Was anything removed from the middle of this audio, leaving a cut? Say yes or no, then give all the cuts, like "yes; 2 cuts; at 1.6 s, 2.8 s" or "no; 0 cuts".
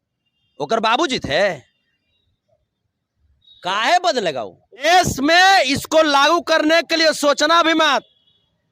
yes; 1 cut; at 4.8 s